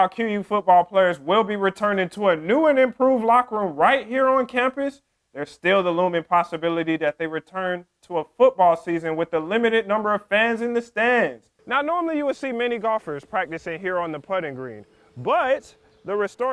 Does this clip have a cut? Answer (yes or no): yes